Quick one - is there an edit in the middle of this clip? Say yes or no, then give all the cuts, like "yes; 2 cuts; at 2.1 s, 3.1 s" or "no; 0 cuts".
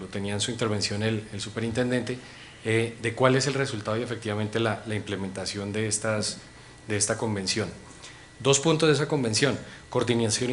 yes; 1 cut; at 4.9 s